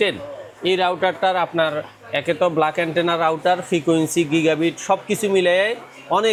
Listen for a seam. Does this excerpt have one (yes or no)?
no